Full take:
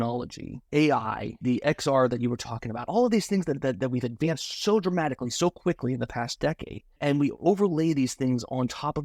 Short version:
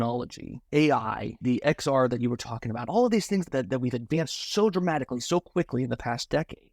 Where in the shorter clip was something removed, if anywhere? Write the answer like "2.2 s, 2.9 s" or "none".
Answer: 3.5 s